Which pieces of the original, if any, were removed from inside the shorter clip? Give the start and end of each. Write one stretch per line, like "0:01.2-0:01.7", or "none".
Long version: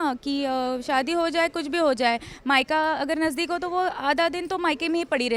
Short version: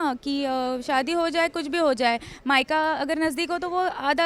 none